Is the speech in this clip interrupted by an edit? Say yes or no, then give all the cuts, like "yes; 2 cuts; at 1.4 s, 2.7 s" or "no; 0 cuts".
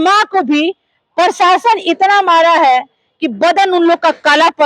no; 0 cuts